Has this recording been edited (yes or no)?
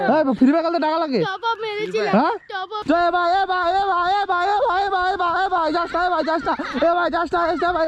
yes